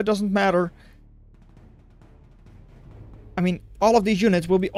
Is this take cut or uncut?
uncut